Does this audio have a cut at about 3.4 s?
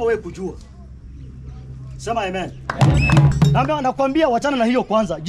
yes; 1 cut; at 3.4 s

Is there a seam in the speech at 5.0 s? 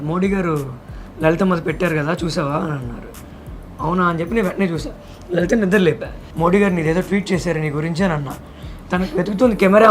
no; 2 cuts; at 6.2 s, 8.7 s

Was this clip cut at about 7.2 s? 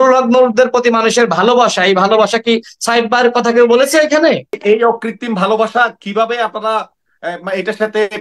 no; 1 cut; at 4.5 s

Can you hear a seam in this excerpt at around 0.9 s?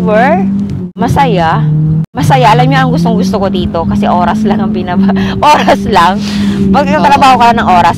yes; 2 cuts; at 0.9 s, 2.2 s

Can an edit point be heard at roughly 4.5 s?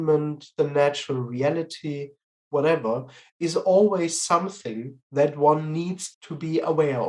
no; 1 cut; at 6.1 s

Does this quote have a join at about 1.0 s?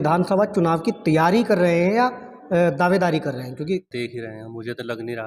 no; 1 cut; at 3.9 s

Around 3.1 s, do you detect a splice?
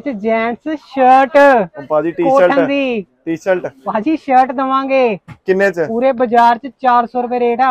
no; 0 cuts

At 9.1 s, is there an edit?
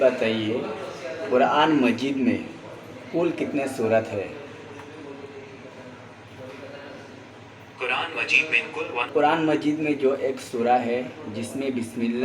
yes; 1 cut; at 9.1 s

